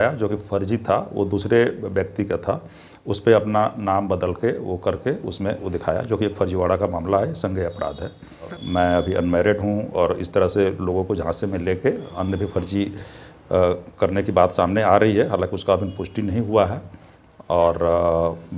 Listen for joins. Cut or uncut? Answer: cut